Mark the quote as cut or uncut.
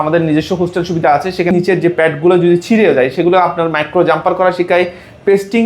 cut